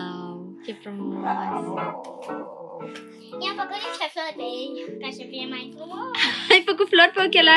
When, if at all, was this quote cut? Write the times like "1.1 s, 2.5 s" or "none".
none